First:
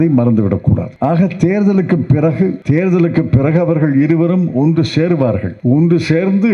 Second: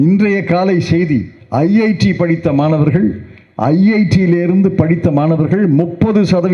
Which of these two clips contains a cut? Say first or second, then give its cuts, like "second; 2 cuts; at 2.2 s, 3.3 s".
first; 3 cuts; at 0.9 s, 2.6 s, 5.5 s